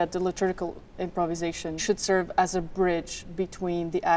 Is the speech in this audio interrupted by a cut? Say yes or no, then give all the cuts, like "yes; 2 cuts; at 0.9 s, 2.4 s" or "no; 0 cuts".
yes; 1 cut; at 1.8 s